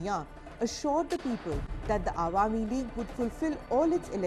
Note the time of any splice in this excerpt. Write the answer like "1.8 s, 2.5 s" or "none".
2.0 s